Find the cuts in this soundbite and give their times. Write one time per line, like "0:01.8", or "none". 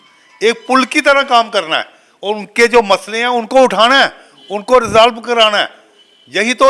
none